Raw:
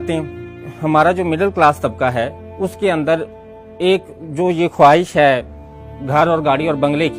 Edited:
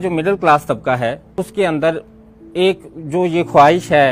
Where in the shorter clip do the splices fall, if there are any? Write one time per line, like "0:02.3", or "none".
0:01.2